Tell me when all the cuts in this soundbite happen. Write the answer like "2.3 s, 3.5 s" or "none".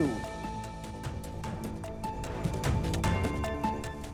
none